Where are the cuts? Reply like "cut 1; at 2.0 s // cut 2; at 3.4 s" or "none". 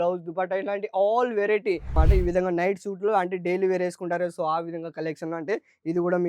cut 1; at 1.9 s